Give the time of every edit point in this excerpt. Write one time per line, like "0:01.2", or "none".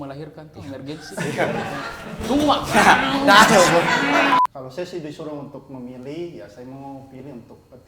0:04.3